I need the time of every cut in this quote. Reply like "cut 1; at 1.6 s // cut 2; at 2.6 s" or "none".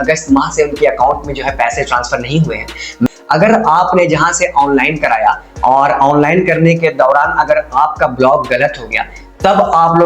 cut 1; at 3.1 s